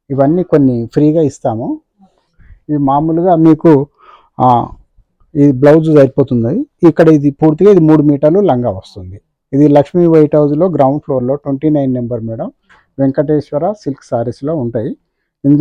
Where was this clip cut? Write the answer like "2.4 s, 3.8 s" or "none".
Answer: none